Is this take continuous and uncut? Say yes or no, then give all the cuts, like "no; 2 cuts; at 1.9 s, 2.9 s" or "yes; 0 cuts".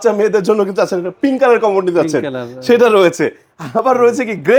yes; 0 cuts